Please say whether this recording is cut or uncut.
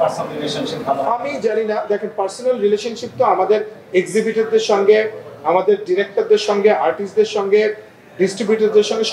uncut